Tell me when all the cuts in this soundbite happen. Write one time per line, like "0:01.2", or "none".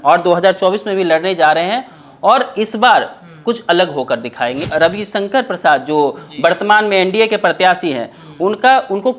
0:04.7